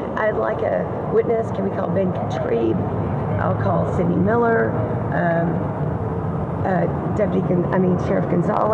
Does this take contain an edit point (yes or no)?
no